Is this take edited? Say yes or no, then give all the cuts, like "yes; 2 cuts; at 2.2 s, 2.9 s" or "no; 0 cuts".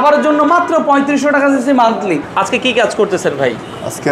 yes; 1 cut; at 2.3 s